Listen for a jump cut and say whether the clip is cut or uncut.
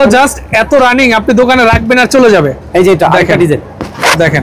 uncut